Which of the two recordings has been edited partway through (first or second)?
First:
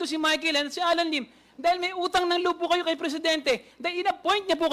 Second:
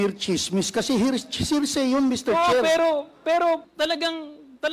second